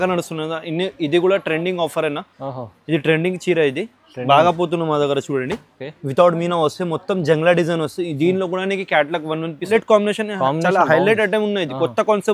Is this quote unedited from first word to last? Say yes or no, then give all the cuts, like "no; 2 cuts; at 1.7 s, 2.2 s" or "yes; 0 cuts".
no; 1 cut; at 9.7 s